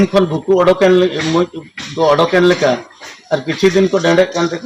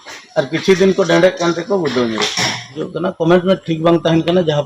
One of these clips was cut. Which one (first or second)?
second